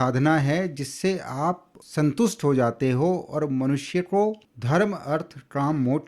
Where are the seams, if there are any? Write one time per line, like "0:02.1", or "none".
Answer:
0:04.5